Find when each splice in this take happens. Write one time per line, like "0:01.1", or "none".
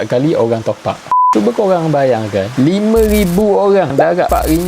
0:01.3